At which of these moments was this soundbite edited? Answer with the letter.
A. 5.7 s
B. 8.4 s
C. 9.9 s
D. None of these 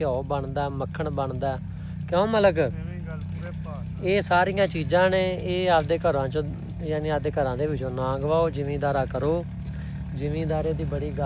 D